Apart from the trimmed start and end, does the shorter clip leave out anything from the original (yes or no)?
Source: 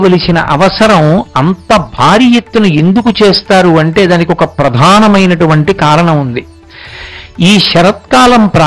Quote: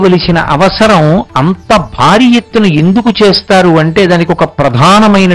no